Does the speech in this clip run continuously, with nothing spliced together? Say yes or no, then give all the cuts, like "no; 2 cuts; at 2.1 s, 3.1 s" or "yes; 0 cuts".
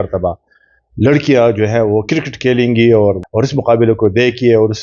no; 1 cut; at 3.2 s